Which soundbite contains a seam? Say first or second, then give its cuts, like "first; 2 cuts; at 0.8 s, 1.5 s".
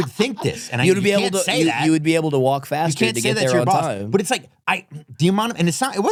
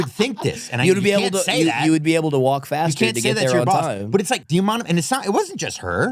second; 1 cut; at 4.4 s